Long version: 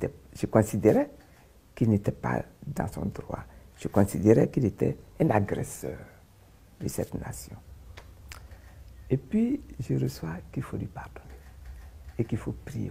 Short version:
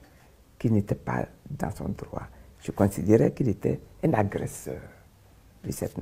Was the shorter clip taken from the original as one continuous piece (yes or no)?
yes